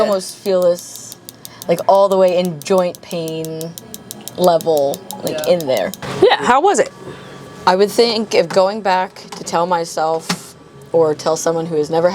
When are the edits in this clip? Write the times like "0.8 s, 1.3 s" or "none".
6.0 s